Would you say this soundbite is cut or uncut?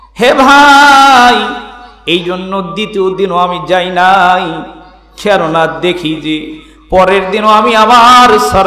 uncut